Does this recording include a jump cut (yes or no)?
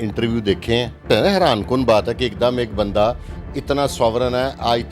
yes